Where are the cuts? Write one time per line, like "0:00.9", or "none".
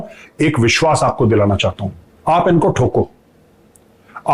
none